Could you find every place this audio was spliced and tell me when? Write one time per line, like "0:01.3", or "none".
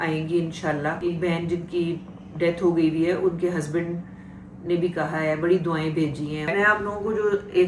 0:01.1
0:06.5